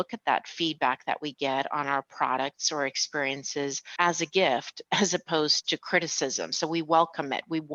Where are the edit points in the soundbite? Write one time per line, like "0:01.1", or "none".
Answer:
none